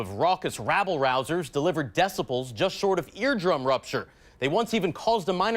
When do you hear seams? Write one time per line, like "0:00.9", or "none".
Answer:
0:01.1